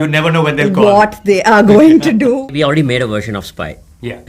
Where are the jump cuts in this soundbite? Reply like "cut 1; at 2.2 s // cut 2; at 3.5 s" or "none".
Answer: cut 1; at 2.5 s

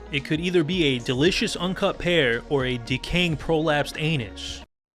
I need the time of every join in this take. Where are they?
none

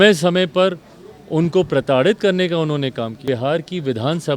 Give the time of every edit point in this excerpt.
cut 1; at 3.2 s

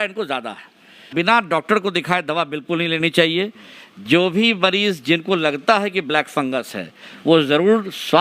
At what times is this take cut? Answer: cut 1; at 1.1 s

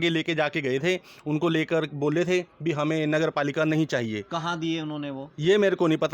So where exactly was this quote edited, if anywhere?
none

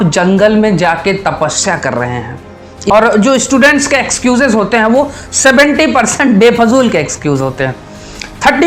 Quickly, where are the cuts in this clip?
cut 1; at 2.9 s

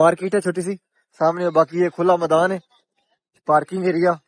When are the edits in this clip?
none

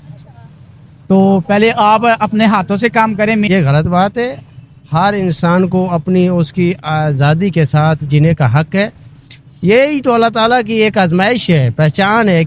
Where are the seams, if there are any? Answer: cut 1; at 3.5 s

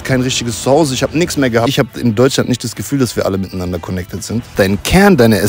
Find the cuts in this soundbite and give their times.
cut 1; at 1.7 s // cut 2; at 4.5 s

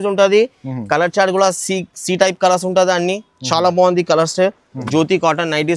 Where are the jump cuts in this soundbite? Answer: cut 1; at 4.7 s

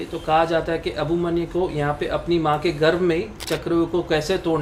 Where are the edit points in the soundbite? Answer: none

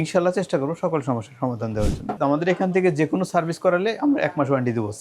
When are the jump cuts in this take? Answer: cut 1; at 2.1 s

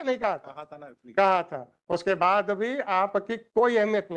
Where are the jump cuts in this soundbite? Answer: none

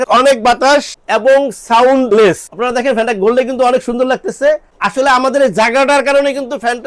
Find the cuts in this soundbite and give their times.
none

